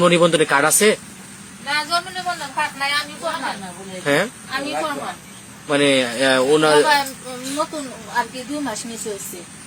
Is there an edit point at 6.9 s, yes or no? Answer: no